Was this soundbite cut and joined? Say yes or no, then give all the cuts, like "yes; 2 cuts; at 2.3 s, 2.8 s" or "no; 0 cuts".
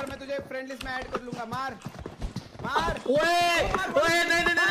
no; 0 cuts